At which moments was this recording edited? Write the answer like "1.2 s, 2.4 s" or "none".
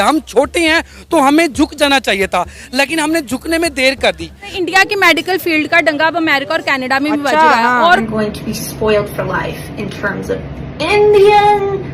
4.5 s, 8.0 s